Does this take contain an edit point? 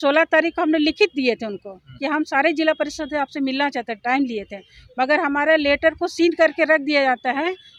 no; 0 cuts

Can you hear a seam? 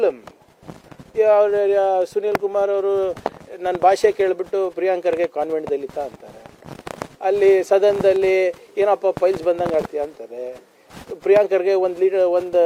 no; 0 cuts

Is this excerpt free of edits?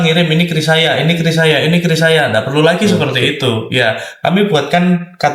yes; 0 cuts

